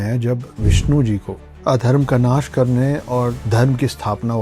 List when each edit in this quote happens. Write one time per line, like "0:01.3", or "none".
none